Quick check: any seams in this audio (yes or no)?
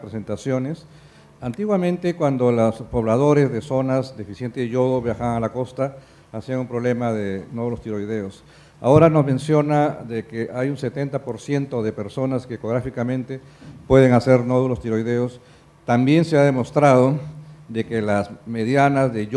no